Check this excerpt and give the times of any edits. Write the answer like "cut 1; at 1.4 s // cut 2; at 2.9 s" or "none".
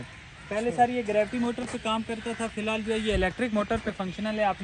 none